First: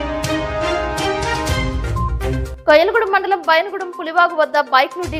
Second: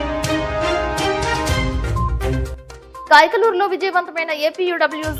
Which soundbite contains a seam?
second; 1 cut; at 2.5 s

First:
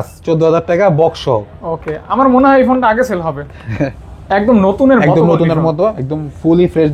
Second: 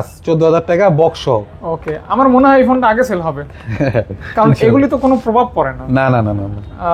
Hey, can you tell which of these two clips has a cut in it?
first; 1 cut; at 3.9 s

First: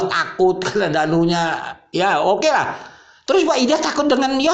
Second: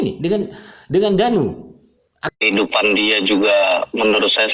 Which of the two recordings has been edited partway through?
second; 1 cut; at 2.3 s

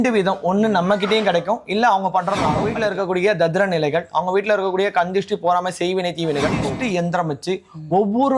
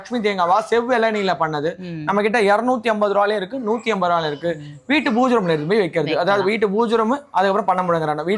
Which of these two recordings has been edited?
first; 2 cuts; at 2.7 s, 6.7 s

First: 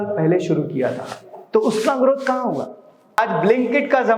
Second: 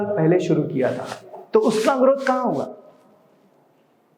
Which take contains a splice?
first; 1 cut; at 3.2 s

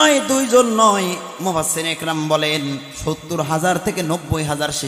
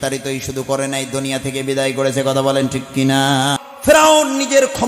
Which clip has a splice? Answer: second; 1 cut; at 3.6 s

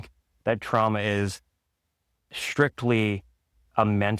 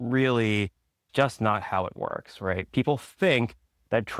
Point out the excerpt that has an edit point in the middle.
second; 1 cut; at 1.0 s

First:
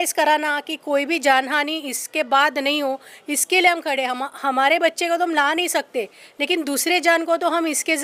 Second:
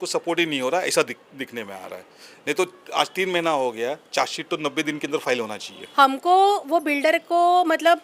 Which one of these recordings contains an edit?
second; 1 cut; at 5.8 s

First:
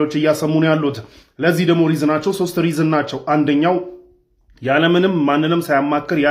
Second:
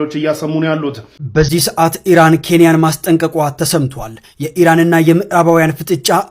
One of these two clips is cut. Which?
second; 1 cut; at 1.1 s

